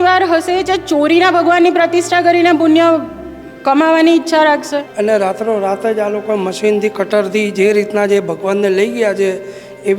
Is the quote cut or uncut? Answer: cut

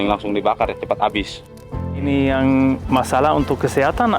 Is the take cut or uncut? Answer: cut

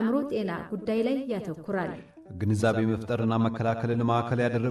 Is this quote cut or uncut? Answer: uncut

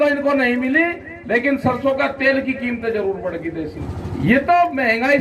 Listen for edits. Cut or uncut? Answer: cut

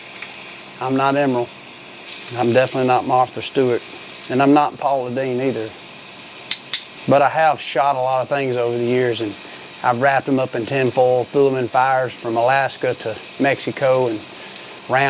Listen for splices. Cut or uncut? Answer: uncut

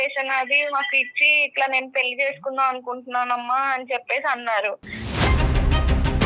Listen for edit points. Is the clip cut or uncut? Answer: cut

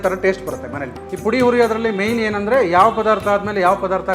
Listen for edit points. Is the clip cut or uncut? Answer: cut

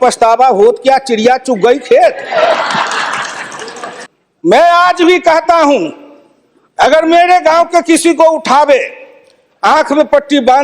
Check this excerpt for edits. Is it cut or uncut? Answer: cut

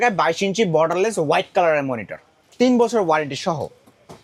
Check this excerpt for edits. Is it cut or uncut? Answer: uncut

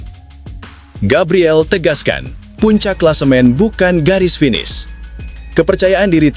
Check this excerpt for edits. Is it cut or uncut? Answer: cut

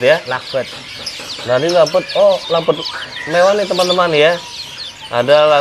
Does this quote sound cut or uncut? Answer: uncut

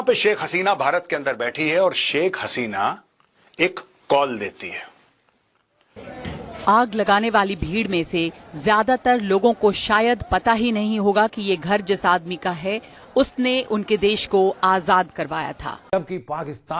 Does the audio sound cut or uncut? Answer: cut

